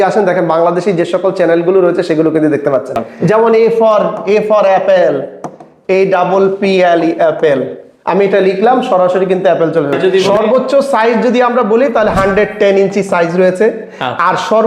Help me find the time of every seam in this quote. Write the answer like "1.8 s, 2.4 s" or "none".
3.1 s, 10.0 s